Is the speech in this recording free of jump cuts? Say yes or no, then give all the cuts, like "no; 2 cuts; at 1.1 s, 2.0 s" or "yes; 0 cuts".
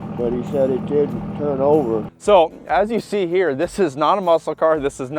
no; 1 cut; at 2.1 s